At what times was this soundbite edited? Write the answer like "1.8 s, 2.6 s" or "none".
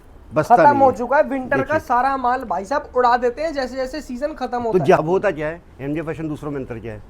5.0 s